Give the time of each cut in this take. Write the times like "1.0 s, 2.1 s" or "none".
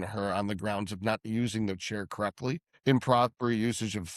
2.7 s